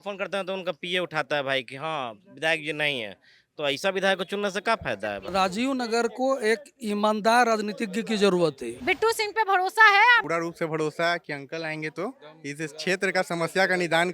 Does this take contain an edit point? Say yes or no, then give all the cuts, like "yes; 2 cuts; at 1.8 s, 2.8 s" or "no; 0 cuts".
yes; 3 cuts; at 5.3 s, 8.7 s, 10.2 s